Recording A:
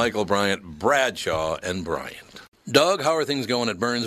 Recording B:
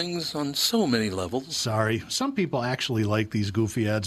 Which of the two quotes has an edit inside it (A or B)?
A